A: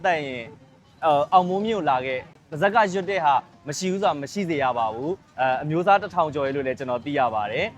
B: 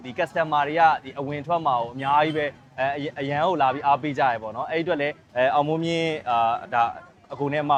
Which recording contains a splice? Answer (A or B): A